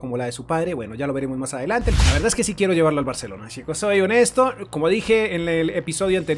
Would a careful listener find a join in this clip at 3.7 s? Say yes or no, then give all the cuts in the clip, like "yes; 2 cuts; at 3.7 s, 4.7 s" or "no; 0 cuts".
no; 1 cut; at 2.0 s